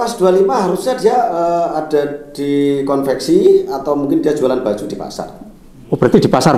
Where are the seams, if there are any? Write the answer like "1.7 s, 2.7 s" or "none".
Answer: none